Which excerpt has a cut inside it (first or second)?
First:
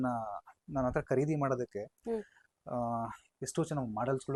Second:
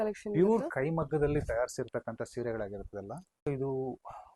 second